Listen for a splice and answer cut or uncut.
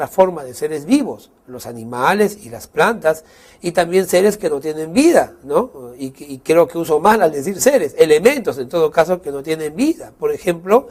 uncut